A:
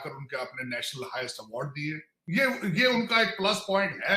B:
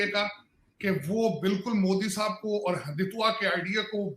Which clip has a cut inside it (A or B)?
A